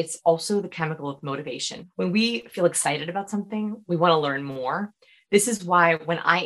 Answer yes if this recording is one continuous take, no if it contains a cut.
no